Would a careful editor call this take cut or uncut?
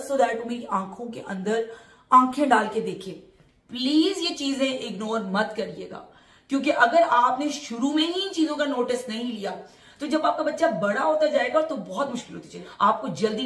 uncut